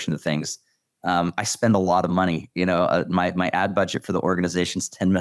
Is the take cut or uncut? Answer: uncut